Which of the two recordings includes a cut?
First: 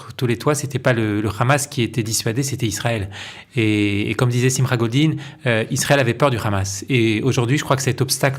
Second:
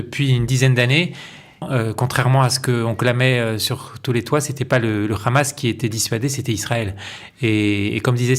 second; 1 cut; at 1.7 s

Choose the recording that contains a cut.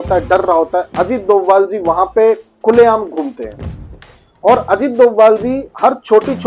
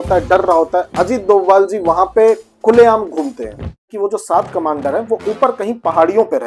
second; 1 cut; at 3.9 s

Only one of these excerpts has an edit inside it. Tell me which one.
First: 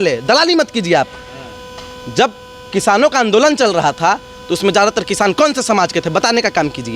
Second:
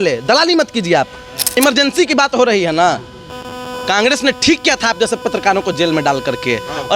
second; 1 cut; at 1.6 s

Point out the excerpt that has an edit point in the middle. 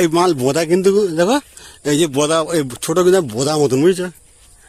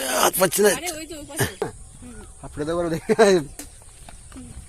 second; 1 cut; at 1.6 s

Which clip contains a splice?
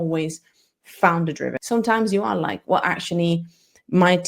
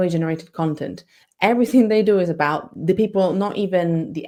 first; 1 cut; at 1.6 s

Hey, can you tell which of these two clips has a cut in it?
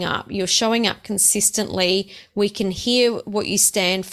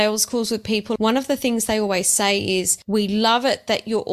second; 2 cuts; at 0.9 s, 2.8 s

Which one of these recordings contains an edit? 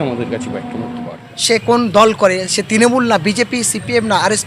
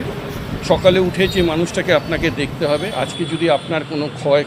first; 1 cut; at 1.1 s

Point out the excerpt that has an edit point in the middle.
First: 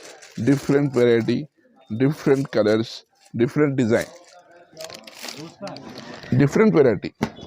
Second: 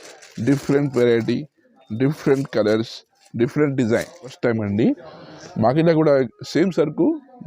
second; 1 cut; at 4.4 s

